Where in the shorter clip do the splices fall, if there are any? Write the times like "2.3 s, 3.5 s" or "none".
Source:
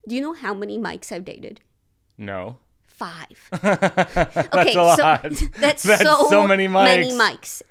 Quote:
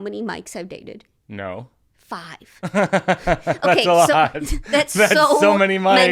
1.1 s